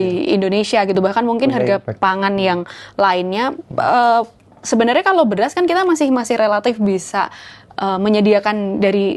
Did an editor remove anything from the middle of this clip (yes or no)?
no